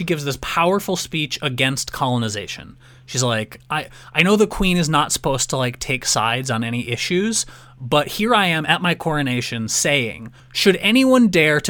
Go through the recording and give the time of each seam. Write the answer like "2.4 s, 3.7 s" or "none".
none